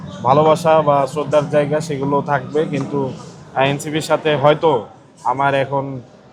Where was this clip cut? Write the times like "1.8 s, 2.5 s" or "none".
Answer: none